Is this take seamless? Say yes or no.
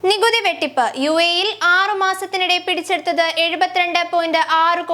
yes